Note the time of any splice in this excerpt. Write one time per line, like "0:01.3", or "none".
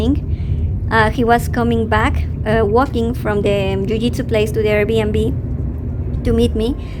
none